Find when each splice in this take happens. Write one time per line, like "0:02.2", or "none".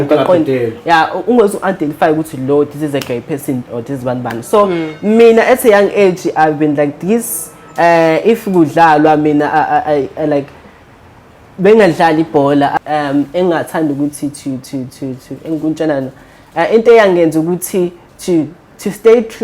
0:12.7